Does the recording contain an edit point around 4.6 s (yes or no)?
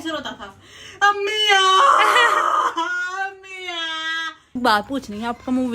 yes